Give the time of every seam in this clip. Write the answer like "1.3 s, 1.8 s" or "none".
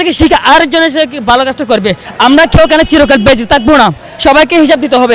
2.0 s